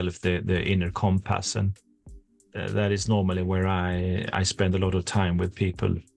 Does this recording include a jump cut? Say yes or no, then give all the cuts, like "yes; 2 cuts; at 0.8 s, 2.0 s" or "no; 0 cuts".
no; 0 cuts